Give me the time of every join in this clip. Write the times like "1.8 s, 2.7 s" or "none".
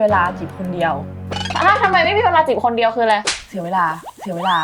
1.2 s